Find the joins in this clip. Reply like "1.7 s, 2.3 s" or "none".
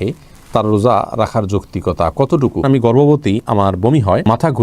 2.6 s